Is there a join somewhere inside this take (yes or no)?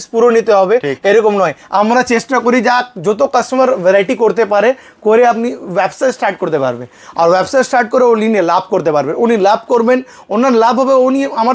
no